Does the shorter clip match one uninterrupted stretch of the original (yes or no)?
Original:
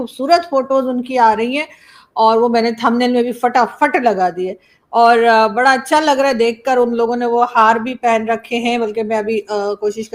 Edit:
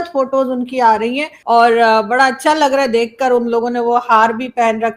no